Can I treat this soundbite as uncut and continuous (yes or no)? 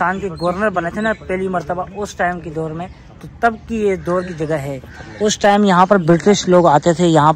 yes